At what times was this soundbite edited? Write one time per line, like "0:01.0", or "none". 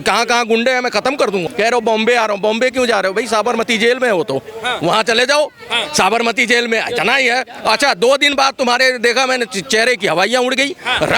0:01.4